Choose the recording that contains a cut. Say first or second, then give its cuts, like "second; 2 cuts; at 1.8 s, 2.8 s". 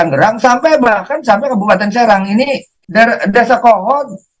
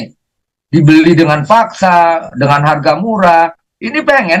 first; 1 cut; at 2.6 s